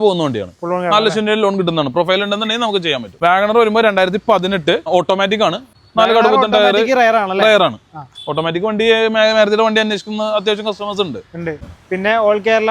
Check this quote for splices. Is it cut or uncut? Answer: cut